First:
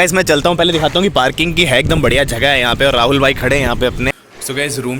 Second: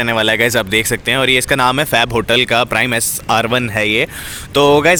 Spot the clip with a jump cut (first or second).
first